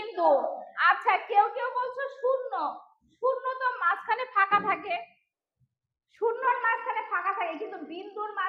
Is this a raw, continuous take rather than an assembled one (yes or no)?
yes